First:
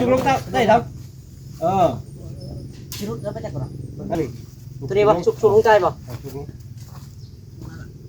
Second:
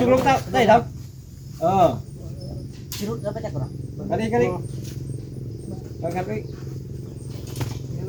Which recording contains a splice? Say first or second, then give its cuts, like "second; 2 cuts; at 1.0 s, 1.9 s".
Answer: first; 1 cut; at 4.2 s